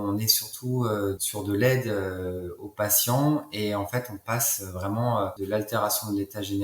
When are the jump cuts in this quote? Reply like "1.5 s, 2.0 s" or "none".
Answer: 1.2 s, 5.3 s